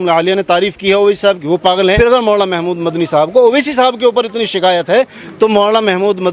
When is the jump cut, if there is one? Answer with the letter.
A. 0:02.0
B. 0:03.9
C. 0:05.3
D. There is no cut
A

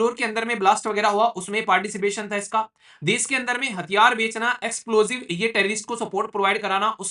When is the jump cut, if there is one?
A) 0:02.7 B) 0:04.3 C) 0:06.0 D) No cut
D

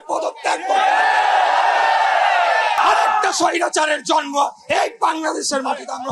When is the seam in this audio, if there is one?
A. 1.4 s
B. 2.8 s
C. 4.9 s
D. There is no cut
B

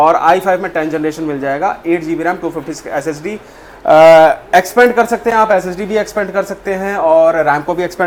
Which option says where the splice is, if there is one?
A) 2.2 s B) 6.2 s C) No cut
C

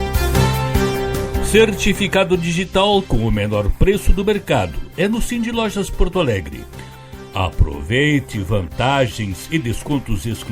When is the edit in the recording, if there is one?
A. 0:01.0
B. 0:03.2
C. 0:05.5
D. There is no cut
A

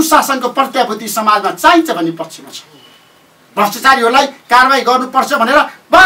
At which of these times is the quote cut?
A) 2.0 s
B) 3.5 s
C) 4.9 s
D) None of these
D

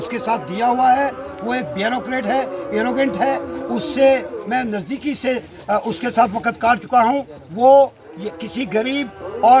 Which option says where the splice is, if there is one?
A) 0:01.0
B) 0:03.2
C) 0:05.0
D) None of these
D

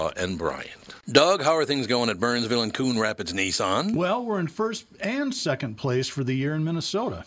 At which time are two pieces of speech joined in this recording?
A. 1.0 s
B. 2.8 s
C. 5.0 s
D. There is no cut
A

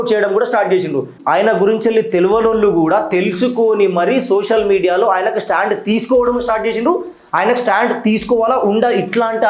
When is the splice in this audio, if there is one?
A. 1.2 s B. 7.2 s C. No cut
A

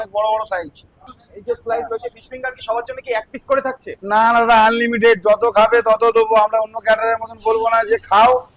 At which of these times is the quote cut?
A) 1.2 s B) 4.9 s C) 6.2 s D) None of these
A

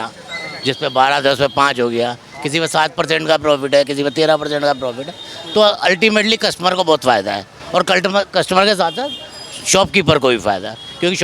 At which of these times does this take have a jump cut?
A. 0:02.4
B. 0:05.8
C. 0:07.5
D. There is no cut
D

